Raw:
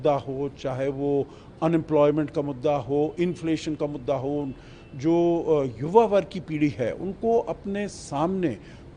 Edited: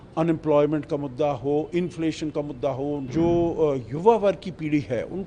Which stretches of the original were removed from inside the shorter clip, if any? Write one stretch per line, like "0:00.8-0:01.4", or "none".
0:04.5-0:04.9